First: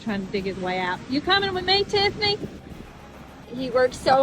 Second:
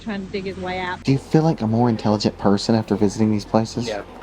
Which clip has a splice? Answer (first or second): second